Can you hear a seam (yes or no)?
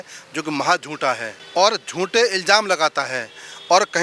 yes